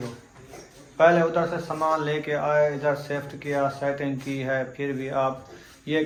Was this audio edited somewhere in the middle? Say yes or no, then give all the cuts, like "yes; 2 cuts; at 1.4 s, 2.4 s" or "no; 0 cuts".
no; 0 cuts